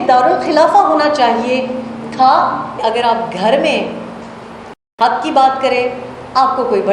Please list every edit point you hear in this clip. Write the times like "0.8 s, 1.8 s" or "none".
2.7 s